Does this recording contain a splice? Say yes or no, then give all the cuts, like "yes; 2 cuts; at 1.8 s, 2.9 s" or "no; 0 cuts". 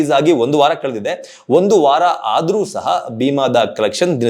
no; 0 cuts